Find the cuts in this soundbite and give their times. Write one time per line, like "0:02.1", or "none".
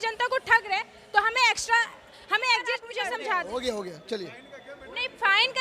0:02.9